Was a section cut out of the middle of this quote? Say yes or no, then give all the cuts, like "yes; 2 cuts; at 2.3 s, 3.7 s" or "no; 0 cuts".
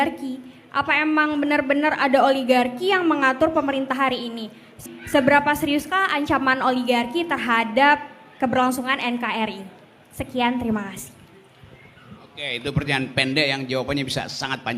yes; 1 cut; at 4.8 s